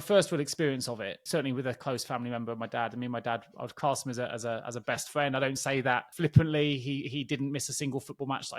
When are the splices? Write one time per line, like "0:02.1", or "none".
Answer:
0:01.1
0:06.1